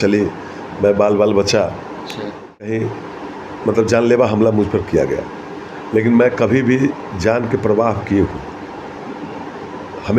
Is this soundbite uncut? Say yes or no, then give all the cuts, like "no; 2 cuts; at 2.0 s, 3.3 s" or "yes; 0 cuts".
no; 1 cut; at 2.8 s